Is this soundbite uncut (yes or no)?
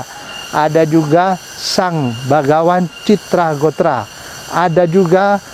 yes